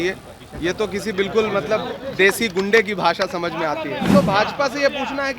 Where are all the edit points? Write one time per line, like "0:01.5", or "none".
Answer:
0:04.1